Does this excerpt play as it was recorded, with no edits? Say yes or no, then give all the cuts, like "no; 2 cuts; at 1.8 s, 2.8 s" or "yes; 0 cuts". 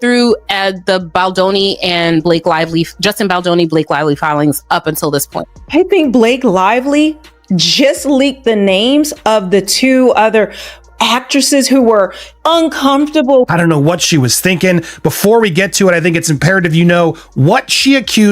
no; 2 cuts; at 5.6 s, 13.4 s